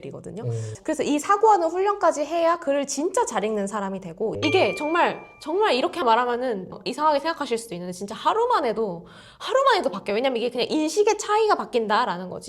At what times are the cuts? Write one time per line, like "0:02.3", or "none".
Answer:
0:04.3